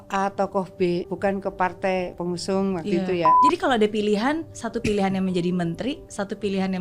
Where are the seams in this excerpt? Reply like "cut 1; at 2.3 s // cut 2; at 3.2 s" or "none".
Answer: cut 1; at 1.1 s // cut 2; at 2.2 s // cut 3; at 3.4 s